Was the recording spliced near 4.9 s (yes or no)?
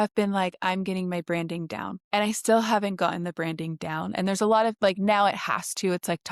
no